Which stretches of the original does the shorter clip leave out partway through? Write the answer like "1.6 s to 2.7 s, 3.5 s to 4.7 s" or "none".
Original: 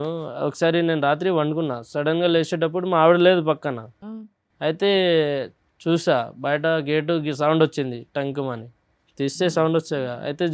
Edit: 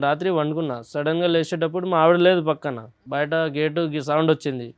4.0 s to 6.3 s